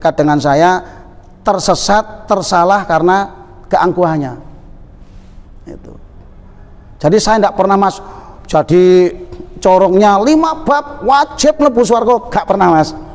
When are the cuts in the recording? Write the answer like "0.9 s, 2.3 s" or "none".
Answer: none